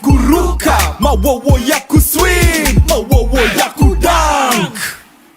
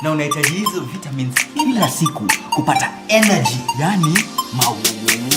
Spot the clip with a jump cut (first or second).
first